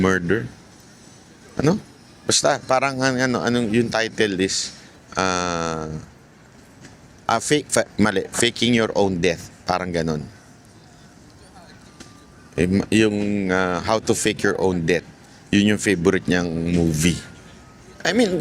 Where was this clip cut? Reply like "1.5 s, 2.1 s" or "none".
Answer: none